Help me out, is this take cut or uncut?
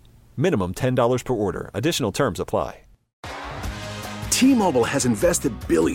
cut